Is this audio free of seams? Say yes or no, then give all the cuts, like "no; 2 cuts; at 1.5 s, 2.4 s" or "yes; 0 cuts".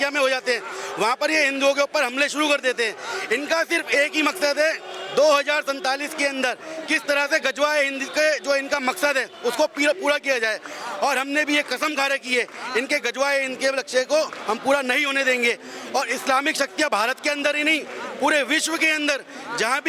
yes; 0 cuts